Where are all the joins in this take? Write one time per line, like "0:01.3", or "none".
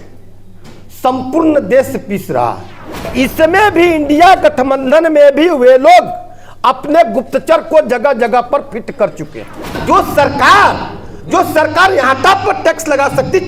0:03.1
0:09.8